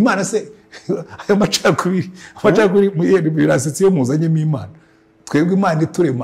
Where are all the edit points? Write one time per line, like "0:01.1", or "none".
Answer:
none

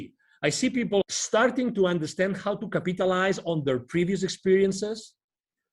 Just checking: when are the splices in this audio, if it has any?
0:01.0

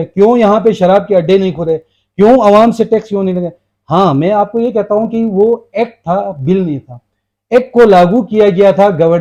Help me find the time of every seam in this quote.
none

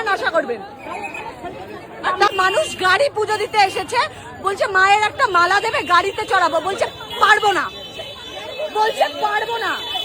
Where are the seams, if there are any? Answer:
0:02.3

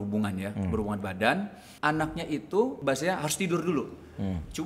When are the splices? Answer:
0:01.6
0:02.8

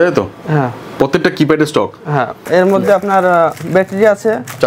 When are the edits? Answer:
0:02.4

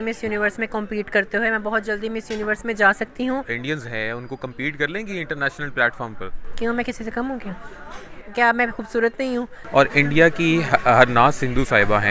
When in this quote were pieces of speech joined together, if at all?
0:03.5
0:09.5

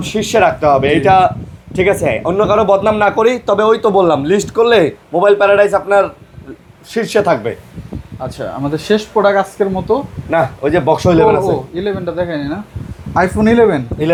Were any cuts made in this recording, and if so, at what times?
none

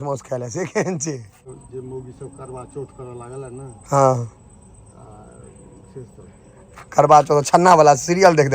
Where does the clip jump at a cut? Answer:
0:01.5

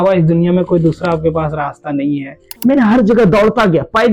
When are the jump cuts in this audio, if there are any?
0:02.5

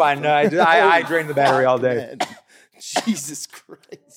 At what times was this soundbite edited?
none

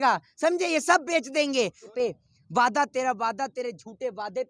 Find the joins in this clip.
0:01.9

